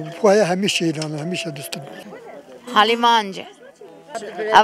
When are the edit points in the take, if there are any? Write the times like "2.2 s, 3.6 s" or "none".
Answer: 2.0 s